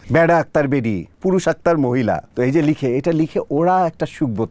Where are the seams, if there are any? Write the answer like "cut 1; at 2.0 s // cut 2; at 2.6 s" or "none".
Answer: cut 1; at 1.1 s // cut 2; at 2.3 s